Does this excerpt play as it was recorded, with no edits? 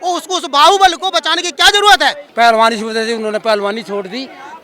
no; 1 cut; at 2.2 s

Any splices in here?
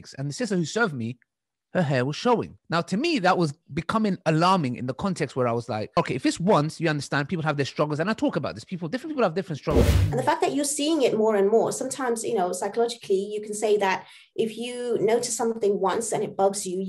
yes; 3 cuts; at 2.6 s, 6.0 s, 9.9 s

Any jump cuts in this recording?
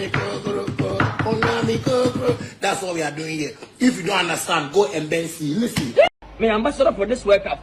yes; 1 cut; at 6.2 s

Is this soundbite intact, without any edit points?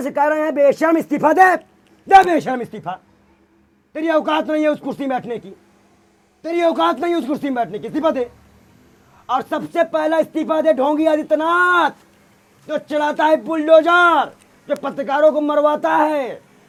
yes; 0 cuts

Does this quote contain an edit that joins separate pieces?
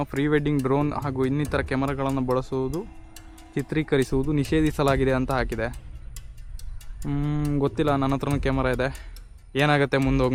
no; 0 cuts

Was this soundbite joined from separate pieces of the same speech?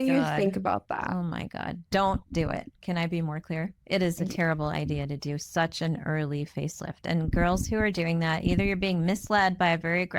no; 0 cuts

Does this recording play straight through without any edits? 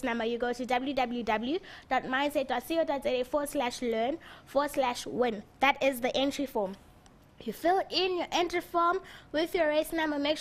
yes; 0 cuts

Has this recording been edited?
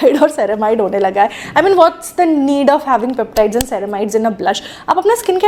no; 0 cuts

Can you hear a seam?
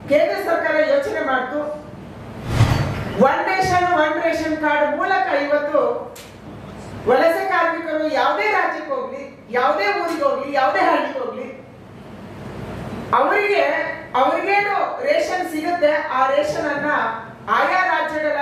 yes; 1 cut; at 2.5 s

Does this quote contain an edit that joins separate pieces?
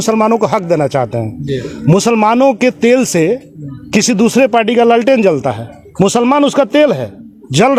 no; 0 cuts

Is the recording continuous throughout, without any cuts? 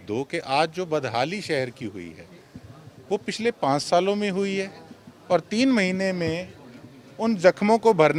yes; 0 cuts

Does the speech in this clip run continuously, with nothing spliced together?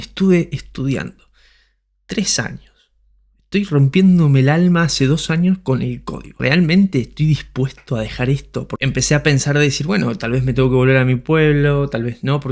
no; 2 cuts; at 6.3 s, 8.7 s

